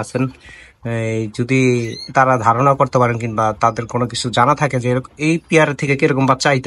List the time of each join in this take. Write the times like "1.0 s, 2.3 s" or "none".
none

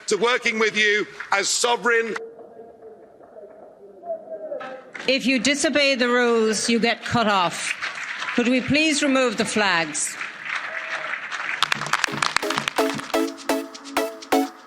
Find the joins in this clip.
12.4 s

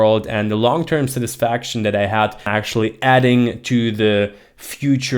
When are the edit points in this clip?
2.5 s

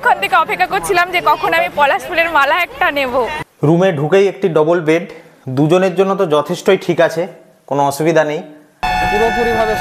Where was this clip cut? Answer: 3.4 s, 8.8 s

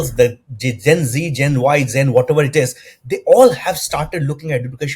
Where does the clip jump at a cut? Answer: none

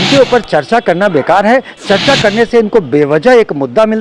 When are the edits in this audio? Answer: none

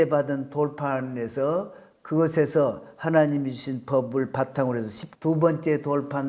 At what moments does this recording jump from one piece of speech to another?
5.0 s

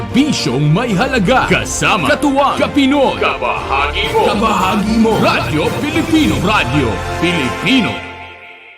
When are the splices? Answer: 1.5 s, 6.4 s

